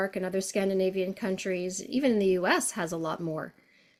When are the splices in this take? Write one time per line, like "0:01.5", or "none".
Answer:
none